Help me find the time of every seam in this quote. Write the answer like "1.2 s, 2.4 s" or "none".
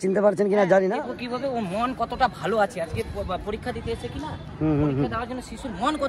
1.1 s